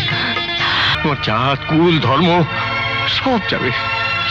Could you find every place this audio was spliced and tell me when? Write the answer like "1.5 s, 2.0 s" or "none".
0.9 s